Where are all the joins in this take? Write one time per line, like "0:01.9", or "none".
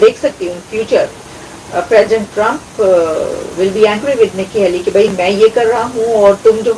none

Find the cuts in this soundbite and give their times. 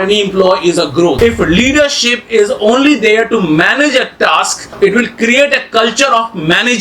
0:01.2
0:04.7

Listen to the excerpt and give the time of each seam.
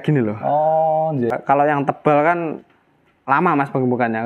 0:01.3

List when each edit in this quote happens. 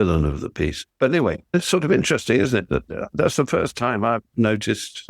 0:01.0

